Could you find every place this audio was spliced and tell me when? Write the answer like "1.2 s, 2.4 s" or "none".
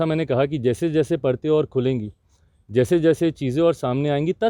none